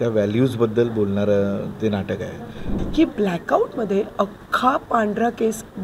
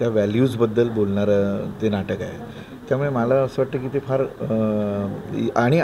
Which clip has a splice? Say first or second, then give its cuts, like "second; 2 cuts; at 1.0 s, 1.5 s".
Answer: first; 1 cut; at 2.7 s